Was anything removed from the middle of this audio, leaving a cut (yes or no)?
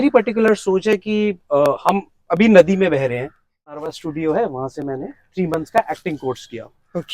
yes